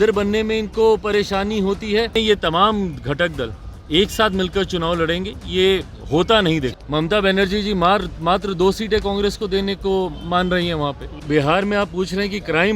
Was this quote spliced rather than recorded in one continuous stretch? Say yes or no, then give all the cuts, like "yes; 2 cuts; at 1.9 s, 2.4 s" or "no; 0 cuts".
yes; 3 cuts; at 2.2 s, 6.8 s, 11.1 s